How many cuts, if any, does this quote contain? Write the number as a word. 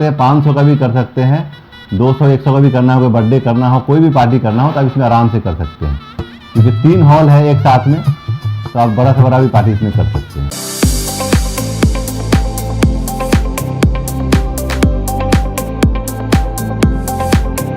one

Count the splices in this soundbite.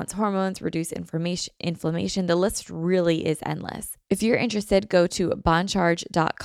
one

